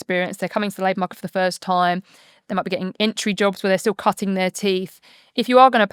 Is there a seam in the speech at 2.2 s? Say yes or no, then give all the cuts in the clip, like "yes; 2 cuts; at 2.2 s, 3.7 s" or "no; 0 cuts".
no; 0 cuts